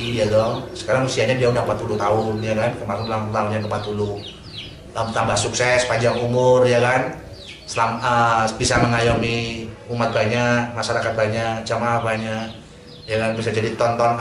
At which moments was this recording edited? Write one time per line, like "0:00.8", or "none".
none